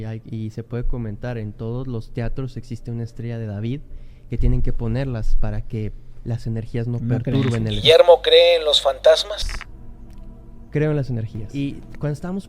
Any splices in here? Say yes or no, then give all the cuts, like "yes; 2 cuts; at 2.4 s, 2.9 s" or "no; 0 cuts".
yes; 2 cuts; at 7.8 s, 11.4 s